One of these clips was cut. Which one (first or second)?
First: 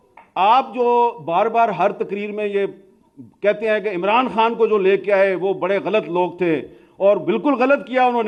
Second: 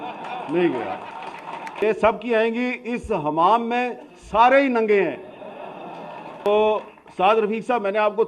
second